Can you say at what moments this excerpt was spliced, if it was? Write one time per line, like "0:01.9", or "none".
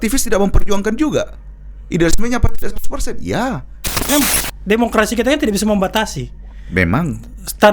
0:04.1